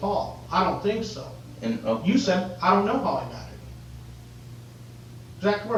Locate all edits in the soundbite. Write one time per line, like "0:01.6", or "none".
none